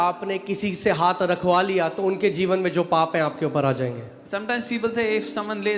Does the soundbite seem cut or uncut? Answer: uncut